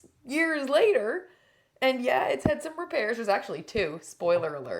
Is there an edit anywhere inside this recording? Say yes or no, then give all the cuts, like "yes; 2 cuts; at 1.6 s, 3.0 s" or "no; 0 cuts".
no; 0 cuts